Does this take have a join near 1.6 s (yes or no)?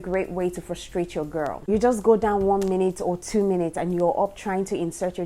yes